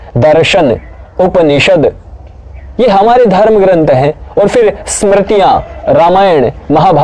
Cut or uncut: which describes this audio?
uncut